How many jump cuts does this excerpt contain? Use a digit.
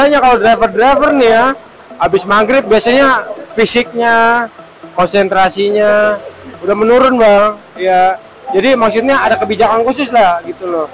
0